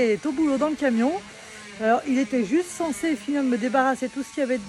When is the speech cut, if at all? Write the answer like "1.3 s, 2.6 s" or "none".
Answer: none